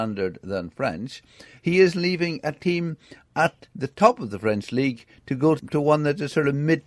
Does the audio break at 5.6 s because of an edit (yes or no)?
yes